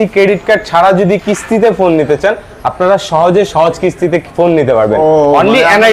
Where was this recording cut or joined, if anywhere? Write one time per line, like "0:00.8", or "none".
none